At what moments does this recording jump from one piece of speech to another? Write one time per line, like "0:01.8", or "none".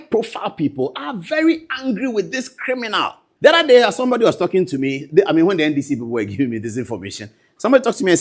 0:03.2